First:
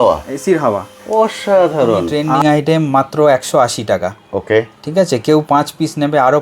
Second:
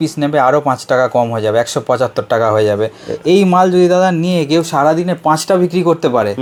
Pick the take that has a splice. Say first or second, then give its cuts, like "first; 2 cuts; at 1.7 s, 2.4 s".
first; 1 cut; at 2.2 s